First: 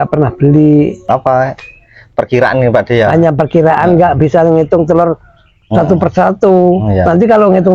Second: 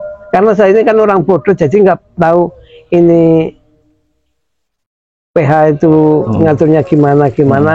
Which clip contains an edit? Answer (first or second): first